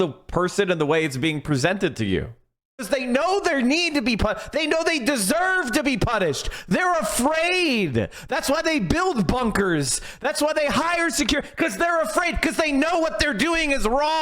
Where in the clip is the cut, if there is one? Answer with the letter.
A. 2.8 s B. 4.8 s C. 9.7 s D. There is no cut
A